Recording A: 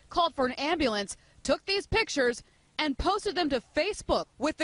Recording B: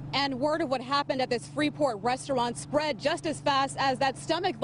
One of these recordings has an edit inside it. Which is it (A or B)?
B